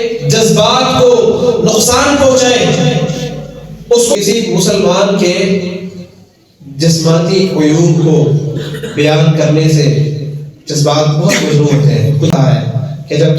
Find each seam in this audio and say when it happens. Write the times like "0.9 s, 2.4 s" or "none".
4.2 s, 12.3 s

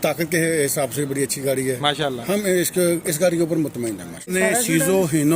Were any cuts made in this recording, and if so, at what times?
4.3 s

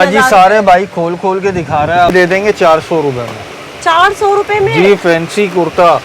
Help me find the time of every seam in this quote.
2.1 s

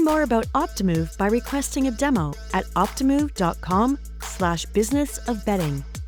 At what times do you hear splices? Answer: none

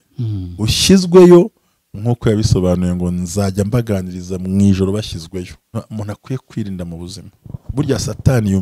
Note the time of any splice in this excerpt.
5.7 s

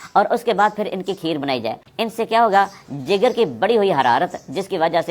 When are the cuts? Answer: 1.8 s

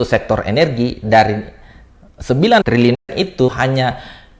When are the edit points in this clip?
3.5 s

